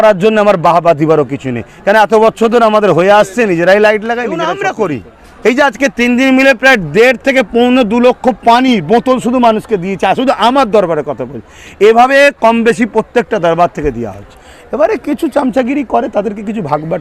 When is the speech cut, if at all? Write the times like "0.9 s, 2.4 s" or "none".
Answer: 4.4 s